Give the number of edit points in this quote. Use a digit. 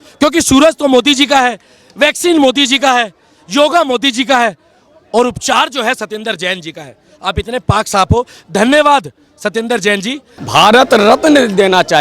1